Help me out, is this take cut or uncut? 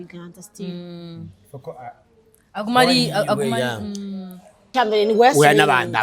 cut